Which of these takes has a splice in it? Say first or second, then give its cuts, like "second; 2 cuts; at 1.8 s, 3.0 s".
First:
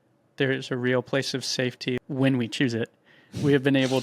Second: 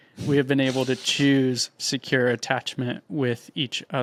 first; 1 cut; at 2.0 s